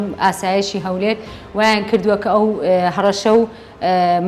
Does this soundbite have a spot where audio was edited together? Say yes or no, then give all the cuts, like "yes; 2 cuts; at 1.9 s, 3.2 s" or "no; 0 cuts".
no; 0 cuts